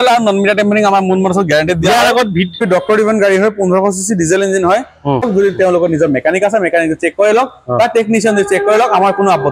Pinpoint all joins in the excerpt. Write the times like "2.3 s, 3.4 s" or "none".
2.6 s, 5.3 s